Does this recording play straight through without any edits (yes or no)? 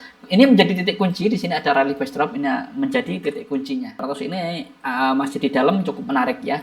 no